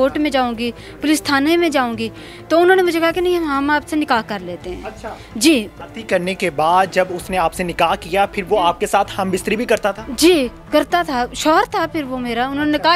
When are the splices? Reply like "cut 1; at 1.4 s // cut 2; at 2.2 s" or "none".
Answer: cut 1; at 5.8 s